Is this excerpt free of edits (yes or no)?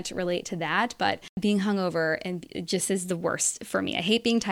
no